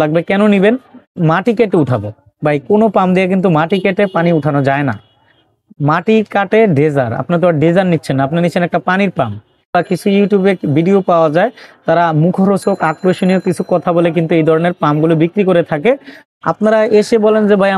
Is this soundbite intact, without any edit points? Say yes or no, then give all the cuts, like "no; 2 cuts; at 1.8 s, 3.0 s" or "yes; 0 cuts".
no; 3 cuts; at 1.1 s, 9.7 s, 16.2 s